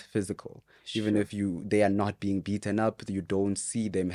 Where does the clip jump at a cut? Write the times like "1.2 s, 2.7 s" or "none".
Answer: none